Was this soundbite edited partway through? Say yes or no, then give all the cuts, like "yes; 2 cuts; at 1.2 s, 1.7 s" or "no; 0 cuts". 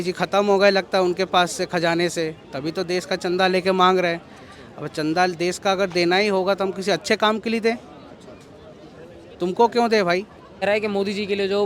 yes; 1 cut; at 10.6 s